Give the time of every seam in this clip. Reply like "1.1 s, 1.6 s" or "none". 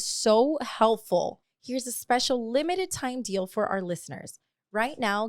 1.4 s